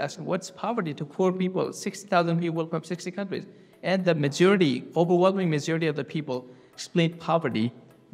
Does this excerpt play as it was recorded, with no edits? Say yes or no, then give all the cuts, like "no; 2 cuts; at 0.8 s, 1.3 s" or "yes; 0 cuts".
yes; 0 cuts